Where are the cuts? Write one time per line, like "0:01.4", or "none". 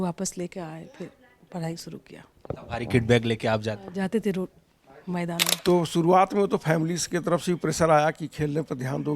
0:05.5